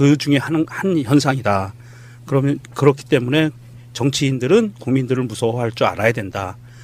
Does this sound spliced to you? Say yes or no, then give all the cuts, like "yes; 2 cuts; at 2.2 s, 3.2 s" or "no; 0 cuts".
yes; 1 cut; at 4.7 s